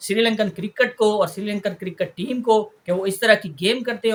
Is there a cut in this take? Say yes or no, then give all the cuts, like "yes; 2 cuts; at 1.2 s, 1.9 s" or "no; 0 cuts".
no; 0 cuts